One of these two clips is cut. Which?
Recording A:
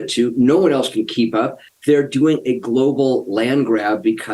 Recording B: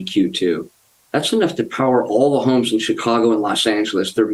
A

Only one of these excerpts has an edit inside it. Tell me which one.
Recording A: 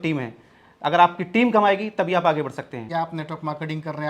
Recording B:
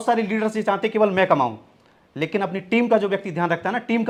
A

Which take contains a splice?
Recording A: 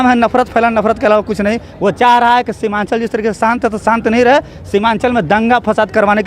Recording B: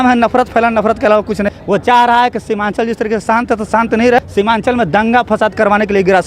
B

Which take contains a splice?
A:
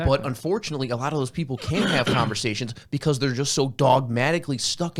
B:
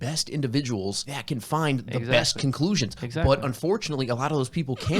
B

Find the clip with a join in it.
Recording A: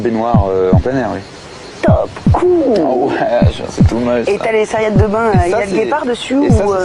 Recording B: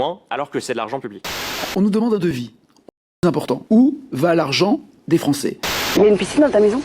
B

